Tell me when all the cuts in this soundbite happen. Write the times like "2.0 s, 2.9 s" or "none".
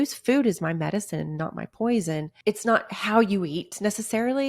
2.3 s